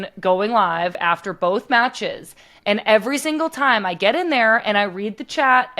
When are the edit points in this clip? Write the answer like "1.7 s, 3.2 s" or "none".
0.9 s